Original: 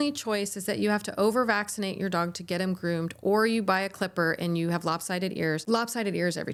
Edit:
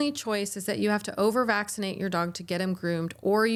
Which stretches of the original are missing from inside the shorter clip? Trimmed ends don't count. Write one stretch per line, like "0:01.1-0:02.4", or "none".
none